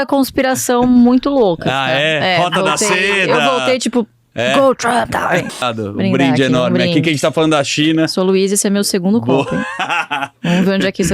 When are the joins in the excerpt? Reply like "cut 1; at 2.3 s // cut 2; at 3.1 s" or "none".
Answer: cut 1; at 5.6 s